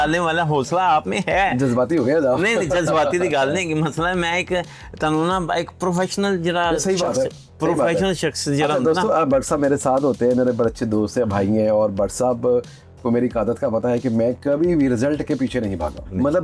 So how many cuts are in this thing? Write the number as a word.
zero